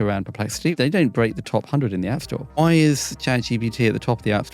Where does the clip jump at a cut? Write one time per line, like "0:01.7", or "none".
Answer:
0:00.7
0:02.6